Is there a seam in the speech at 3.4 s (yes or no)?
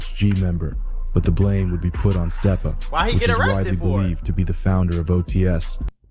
no